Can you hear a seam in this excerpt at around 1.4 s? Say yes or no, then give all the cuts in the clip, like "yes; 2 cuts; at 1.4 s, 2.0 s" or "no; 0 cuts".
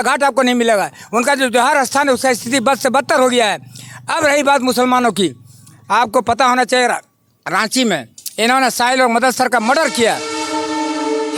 no; 0 cuts